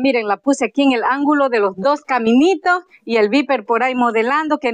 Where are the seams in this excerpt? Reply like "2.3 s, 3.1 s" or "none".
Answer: none